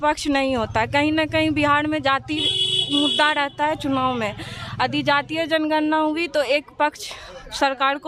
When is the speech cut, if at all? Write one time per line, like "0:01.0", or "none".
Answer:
none